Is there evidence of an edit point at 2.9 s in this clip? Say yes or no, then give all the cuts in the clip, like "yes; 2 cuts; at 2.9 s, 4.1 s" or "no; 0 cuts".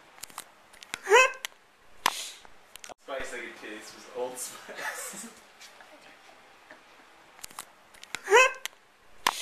yes; 1 cut; at 2.9 s